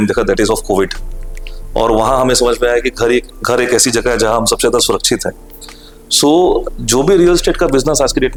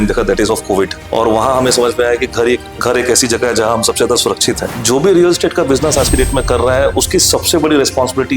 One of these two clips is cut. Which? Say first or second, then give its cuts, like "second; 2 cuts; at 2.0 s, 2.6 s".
second; 2 cuts; at 1.0 s, 4.7 s